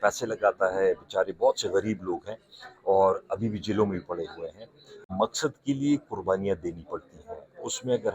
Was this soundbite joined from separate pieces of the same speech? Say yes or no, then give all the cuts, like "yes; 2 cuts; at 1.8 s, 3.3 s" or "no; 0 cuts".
yes; 1 cut; at 5.0 s